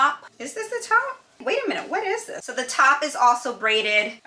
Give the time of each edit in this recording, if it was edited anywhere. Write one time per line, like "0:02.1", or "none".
none